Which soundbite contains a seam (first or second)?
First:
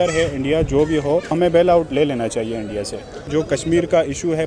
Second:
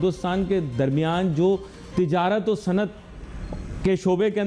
first